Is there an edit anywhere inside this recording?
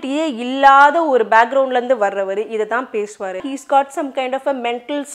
yes; 1 cut; at 3.5 s

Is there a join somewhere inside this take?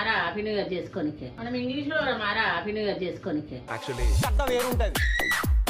yes; 2 cuts; at 1.3 s, 3.5 s

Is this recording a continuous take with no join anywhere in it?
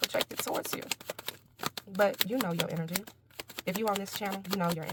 yes; 0 cuts

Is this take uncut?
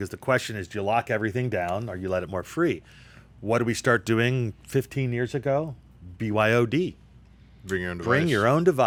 yes; 0 cuts

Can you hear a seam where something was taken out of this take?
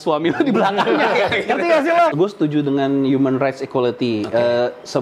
yes; 1 cut; at 2.1 s

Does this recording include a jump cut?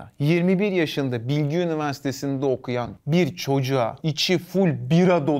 yes; 2 cuts; at 2.9 s, 4.1 s

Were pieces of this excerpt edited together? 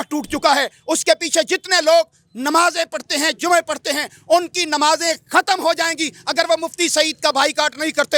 no; 0 cuts

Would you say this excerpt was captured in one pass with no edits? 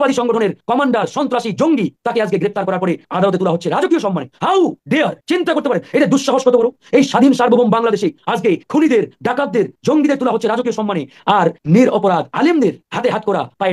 yes; 0 cuts

